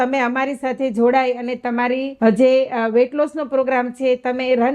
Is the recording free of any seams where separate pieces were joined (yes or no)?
no